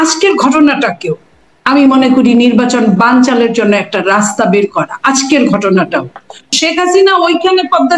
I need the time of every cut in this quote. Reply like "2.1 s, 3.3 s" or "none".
6.4 s